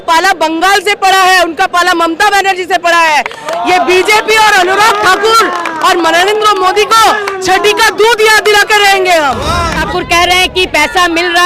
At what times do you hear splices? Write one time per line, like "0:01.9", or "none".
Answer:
0:09.8